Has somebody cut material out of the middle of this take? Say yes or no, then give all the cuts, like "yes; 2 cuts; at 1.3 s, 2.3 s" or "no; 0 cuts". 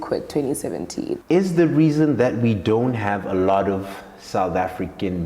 yes; 1 cut; at 1.2 s